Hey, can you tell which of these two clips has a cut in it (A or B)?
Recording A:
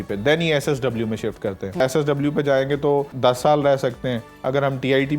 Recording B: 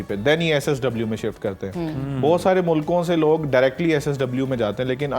A